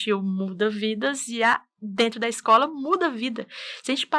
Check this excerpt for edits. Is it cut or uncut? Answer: uncut